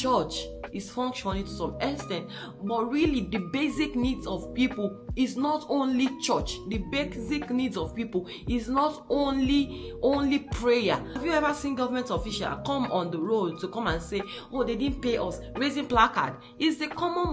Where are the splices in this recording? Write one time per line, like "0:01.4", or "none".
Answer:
0:11.2